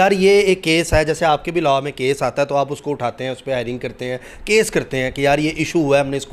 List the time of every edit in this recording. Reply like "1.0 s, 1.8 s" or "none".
none